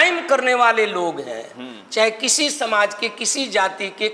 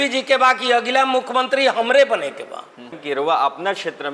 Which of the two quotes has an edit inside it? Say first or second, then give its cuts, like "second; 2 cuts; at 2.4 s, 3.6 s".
second; 1 cut; at 3.0 s